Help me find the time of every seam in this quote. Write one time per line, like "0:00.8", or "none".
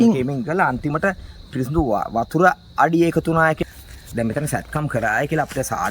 0:03.6